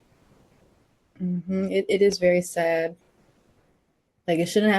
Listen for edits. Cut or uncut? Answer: cut